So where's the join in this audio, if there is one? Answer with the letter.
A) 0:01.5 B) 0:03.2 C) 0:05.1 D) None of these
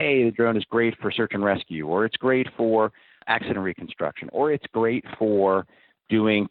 B